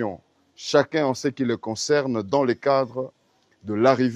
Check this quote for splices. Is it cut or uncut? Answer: uncut